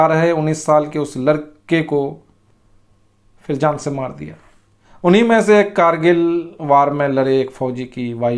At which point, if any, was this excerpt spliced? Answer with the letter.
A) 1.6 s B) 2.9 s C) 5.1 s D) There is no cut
C